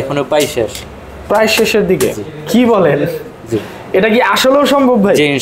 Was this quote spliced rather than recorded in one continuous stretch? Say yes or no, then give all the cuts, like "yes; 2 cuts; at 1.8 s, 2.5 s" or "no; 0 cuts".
no; 0 cuts